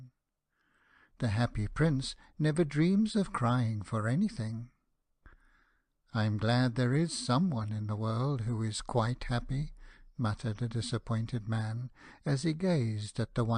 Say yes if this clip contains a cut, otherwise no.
no